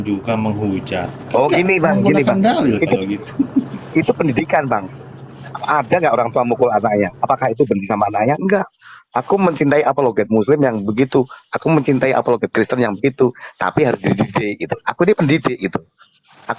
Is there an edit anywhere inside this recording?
no; 0 cuts

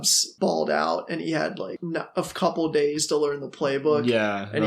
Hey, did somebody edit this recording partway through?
yes; 1 cut; at 1.7 s

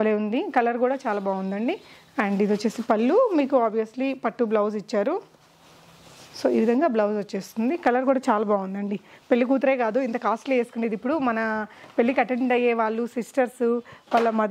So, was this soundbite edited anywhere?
no; 0 cuts

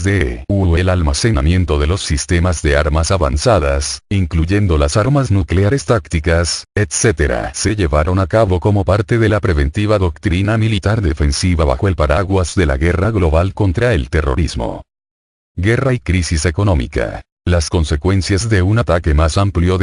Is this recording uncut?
yes; 0 cuts

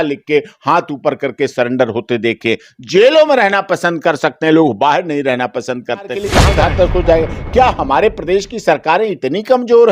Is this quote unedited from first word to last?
no; 1 cut; at 6.3 s

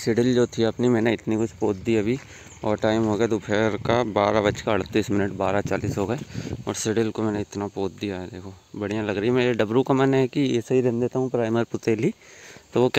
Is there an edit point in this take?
no; 0 cuts

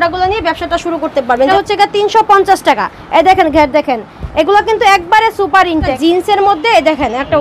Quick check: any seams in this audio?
yes; 2 cuts; at 1.5 s, 6.0 s

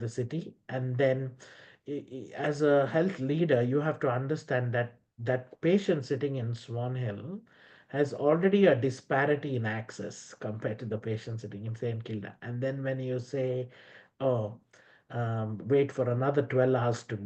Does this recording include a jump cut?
no; 0 cuts

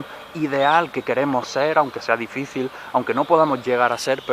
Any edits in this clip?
no; 0 cuts

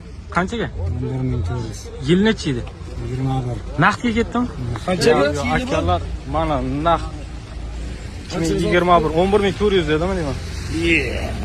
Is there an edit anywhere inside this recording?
no; 0 cuts

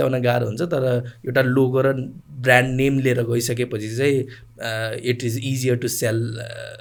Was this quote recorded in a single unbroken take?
yes; 0 cuts

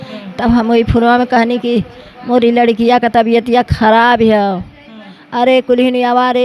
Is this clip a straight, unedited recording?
yes; 0 cuts

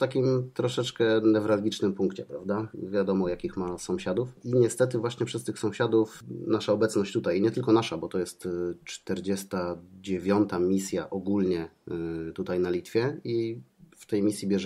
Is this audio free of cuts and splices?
no; 3 cuts; at 2.8 s, 4.4 s, 6.2 s

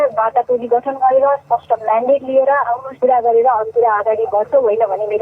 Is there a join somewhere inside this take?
yes; 1 cut; at 2.9 s

